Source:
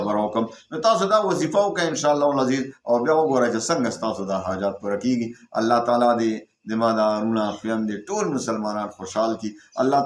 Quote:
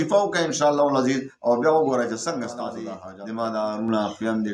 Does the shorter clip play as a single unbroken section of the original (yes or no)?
no